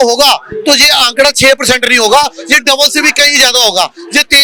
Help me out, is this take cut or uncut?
uncut